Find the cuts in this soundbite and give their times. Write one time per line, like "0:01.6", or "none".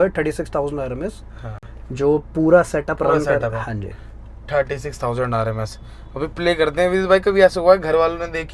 none